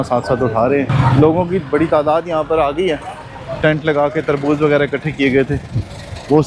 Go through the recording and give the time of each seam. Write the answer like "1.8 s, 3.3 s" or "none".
0.9 s, 3.6 s